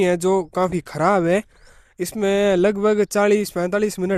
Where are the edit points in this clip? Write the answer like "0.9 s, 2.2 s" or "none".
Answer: none